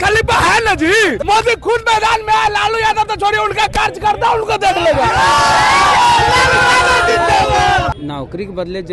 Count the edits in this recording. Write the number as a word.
two